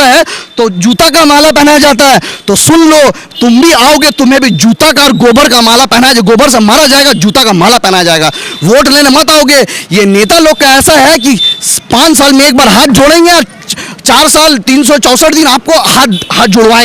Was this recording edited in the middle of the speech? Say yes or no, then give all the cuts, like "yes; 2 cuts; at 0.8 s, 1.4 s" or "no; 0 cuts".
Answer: no; 0 cuts